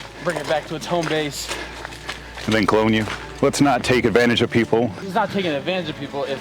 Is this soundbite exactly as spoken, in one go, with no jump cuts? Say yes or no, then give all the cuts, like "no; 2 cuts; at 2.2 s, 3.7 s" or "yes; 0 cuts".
no; 2 cuts; at 3.3 s, 5.0 s